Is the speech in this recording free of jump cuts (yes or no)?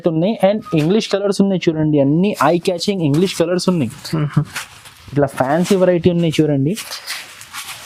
yes